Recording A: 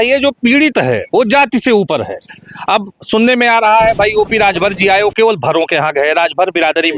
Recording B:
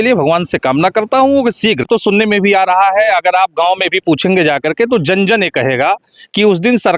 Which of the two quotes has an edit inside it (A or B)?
B